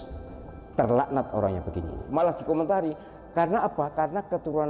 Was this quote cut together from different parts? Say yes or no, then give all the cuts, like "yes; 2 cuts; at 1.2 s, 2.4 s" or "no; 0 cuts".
yes; 1 cut; at 2.0 s